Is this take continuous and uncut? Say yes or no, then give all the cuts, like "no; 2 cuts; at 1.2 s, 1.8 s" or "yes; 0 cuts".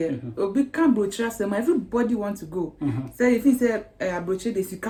yes; 0 cuts